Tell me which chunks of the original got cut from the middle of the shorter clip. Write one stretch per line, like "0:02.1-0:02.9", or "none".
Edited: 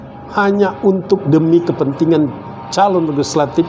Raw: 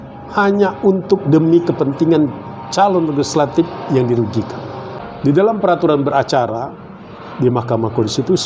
none